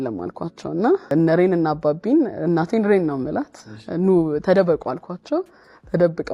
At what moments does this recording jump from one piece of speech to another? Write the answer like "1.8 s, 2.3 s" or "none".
1.1 s